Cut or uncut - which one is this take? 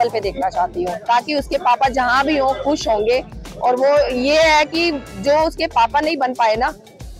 uncut